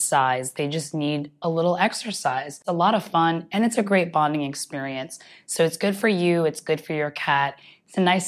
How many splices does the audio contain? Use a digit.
1